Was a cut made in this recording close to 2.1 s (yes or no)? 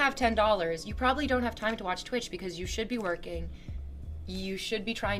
no